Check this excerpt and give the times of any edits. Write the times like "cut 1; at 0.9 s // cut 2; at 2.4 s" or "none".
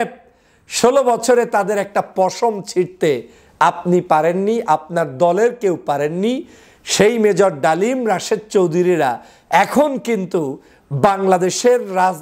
none